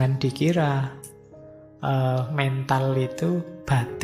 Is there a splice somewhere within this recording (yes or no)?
no